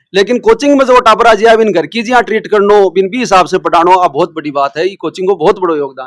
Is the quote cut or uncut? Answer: uncut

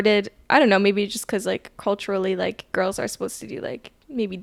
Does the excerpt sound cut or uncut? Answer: uncut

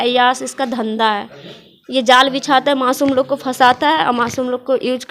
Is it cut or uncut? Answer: uncut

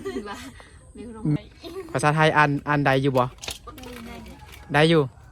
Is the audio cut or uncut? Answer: cut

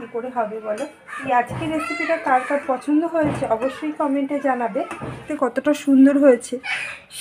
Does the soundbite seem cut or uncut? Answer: cut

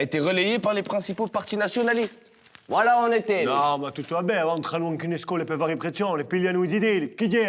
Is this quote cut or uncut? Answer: uncut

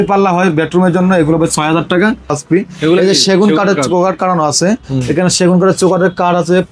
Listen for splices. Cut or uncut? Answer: cut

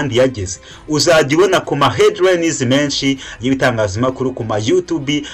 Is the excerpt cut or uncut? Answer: uncut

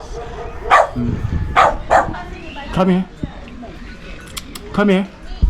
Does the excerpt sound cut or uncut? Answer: cut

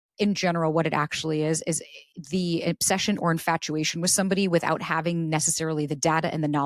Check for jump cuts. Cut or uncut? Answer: uncut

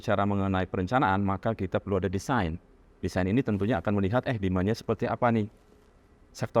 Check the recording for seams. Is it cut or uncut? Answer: uncut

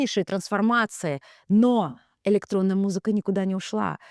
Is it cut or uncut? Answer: uncut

